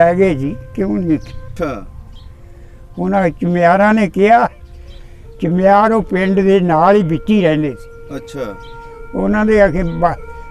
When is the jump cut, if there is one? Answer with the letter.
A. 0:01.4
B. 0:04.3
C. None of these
A